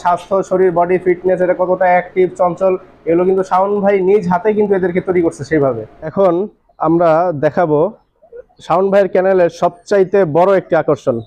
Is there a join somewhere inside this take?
yes; 1 cut; at 6.1 s

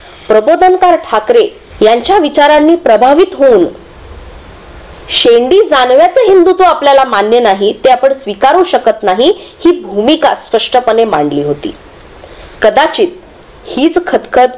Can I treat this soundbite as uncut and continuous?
no; 1 cut; at 1.6 s

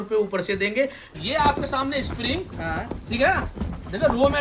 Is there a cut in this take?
yes; 1 cut; at 1.1 s

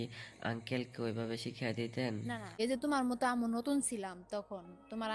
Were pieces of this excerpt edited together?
yes; 1 cut; at 2.4 s

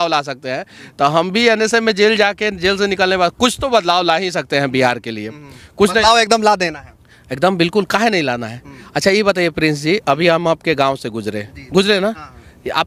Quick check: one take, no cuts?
yes; 0 cuts

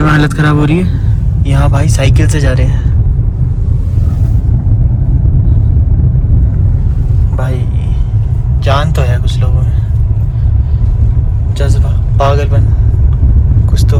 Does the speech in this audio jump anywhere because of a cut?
no; 0 cuts

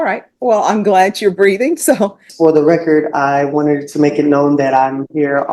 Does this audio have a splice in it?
yes; 1 cut; at 2.2 s

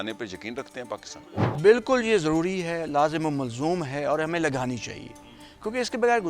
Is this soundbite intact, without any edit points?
no; 1 cut; at 1.3 s

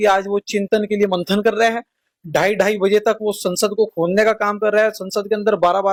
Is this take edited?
no; 0 cuts

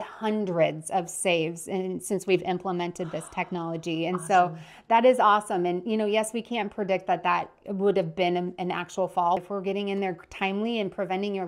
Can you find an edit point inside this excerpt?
yes; 1 cut; at 9.4 s

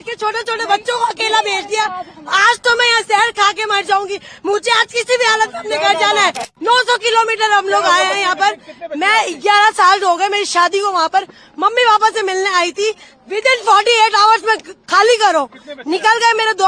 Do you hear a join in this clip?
yes; 1 cut; at 6.5 s

